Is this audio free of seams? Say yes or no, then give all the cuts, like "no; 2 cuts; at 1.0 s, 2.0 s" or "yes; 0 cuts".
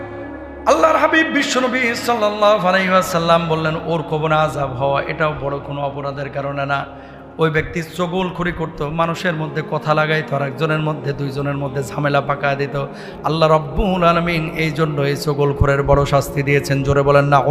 yes; 0 cuts